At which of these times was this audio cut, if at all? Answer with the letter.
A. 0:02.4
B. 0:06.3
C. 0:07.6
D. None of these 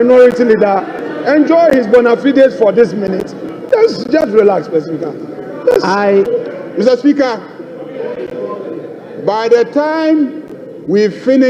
B